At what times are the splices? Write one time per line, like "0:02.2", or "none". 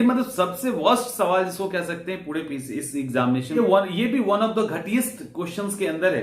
0:03.6